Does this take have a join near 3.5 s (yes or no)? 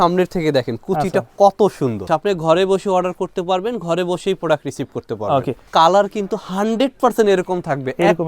no